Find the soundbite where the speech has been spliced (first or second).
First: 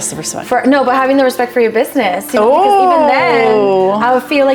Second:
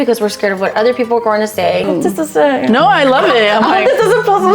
second